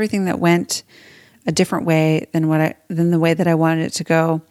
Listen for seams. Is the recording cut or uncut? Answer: uncut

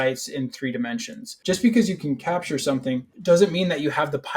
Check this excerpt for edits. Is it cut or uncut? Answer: cut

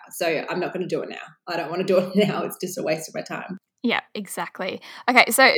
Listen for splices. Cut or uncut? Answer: uncut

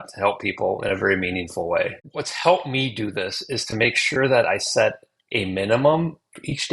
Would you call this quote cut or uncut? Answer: cut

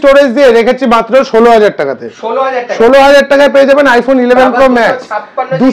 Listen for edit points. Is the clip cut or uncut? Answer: uncut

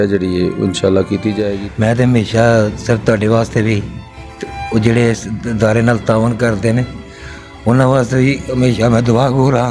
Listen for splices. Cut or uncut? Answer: cut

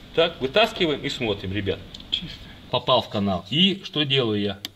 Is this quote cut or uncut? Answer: cut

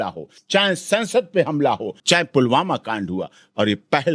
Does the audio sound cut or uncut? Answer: cut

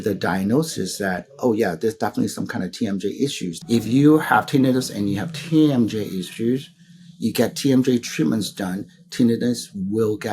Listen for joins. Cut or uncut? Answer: cut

